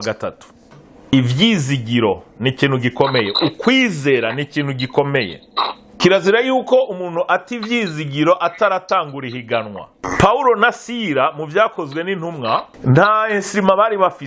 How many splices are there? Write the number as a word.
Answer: four